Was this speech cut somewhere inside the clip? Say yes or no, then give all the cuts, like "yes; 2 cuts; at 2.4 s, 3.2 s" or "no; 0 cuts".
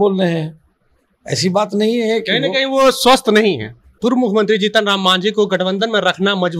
yes; 1 cut; at 4.0 s